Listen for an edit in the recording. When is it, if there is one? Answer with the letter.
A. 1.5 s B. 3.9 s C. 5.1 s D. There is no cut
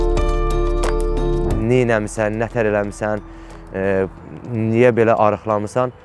A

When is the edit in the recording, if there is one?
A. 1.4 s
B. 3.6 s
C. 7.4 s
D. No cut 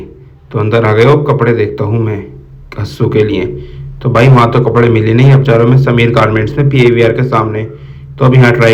D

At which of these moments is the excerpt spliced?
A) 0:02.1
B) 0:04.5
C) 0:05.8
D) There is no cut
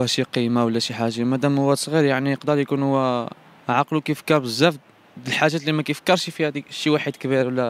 D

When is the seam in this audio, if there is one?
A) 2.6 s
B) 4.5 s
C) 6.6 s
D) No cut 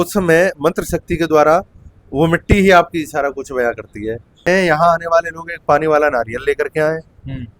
B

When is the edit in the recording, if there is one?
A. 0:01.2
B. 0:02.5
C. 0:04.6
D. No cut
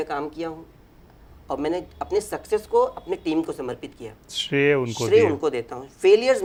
D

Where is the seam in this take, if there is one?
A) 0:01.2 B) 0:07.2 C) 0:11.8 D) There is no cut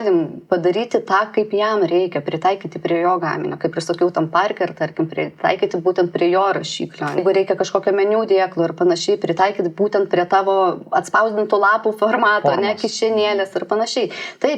B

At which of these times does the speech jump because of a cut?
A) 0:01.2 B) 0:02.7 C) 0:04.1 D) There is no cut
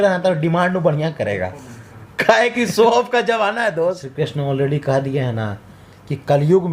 C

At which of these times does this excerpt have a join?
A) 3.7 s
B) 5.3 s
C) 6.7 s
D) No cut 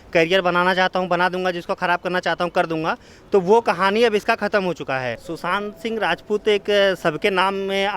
B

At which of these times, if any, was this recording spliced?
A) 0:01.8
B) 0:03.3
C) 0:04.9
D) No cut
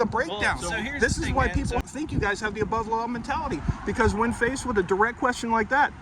A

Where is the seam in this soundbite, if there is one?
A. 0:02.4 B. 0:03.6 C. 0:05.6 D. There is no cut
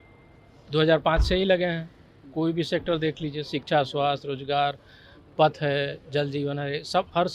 D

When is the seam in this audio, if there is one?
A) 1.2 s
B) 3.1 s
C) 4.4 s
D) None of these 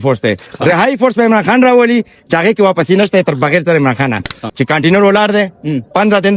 C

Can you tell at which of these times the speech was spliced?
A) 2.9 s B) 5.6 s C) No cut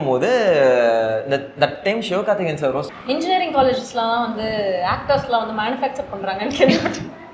A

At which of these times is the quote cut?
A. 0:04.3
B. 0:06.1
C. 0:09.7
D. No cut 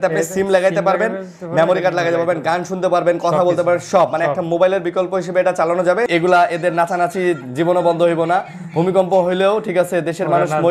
B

